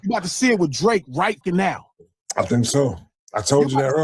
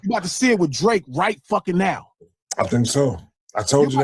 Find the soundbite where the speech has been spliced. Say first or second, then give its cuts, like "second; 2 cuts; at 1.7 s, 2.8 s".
first; 1 cut; at 1.4 s